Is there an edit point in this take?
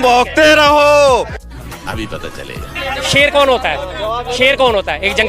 yes; 2 cuts; at 1.4 s, 2.8 s

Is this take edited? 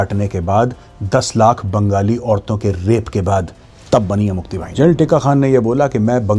yes; 1 cut; at 4.6 s

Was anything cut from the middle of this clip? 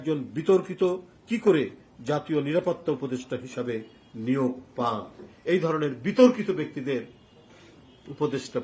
yes; 2 cuts; at 1.1 s, 5.3 s

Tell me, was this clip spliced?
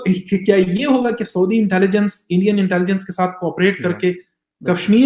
no; 0 cuts

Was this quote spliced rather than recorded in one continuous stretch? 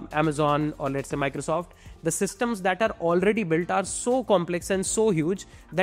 no; 0 cuts

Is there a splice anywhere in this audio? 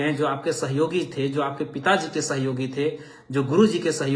no; 0 cuts

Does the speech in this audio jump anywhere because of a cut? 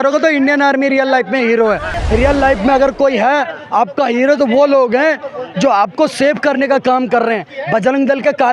yes; 1 cut; at 1.9 s

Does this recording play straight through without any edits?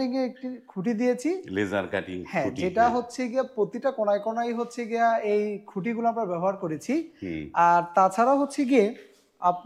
yes; 0 cuts

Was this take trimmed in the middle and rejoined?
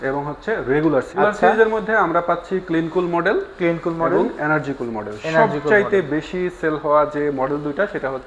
yes; 1 cut; at 1.2 s

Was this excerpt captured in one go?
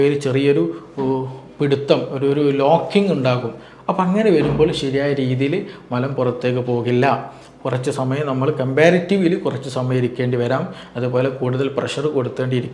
yes; 0 cuts

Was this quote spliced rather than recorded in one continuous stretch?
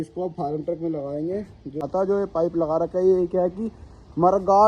yes; 1 cut; at 1.8 s

